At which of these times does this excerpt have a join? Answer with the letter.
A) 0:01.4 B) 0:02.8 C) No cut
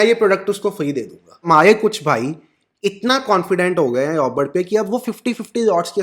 A